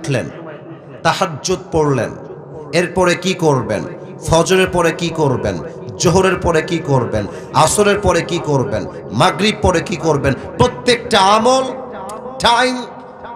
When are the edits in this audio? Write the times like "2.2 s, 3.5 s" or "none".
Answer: none